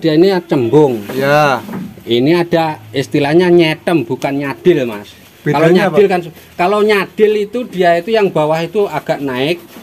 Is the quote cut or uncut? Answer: uncut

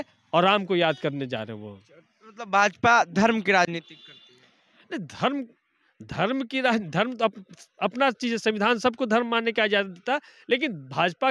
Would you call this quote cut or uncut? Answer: uncut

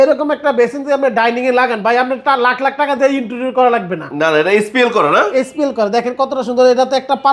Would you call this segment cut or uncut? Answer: uncut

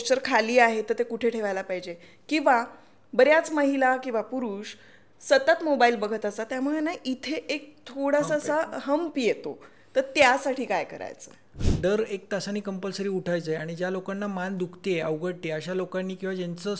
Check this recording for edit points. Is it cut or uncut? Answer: cut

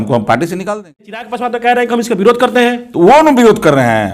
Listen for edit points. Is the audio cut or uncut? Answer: cut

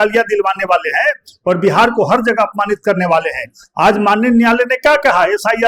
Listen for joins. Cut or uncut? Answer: uncut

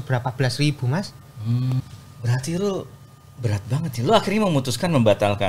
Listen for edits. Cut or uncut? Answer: cut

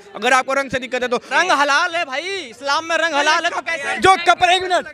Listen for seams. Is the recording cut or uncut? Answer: cut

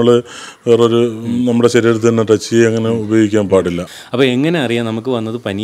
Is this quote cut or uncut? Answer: cut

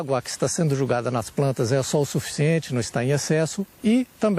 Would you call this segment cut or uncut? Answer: uncut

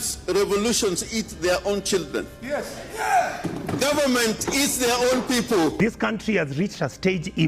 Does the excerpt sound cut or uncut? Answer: cut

